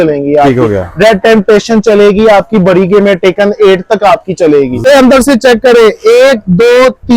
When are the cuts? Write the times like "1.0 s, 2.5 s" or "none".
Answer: 4.8 s